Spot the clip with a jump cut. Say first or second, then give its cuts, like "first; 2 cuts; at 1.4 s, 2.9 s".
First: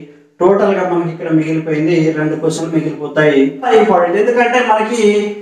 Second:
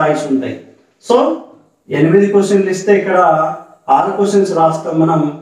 first; 1 cut; at 3.7 s